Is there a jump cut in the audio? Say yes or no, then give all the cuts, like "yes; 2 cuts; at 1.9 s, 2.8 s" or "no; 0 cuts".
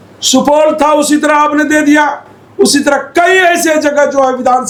no; 0 cuts